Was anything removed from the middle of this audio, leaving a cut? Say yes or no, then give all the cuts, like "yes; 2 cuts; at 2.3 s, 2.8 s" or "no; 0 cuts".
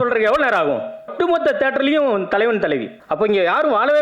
yes; 2 cuts; at 1.1 s, 2.9 s